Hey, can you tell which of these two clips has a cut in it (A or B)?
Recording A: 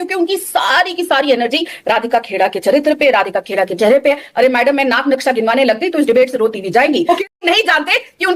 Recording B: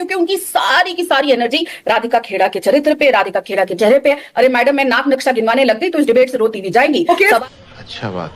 A